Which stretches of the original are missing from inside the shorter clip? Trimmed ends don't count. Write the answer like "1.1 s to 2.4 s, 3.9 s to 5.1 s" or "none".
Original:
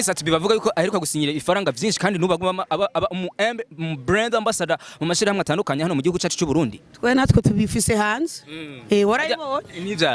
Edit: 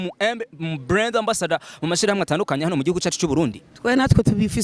none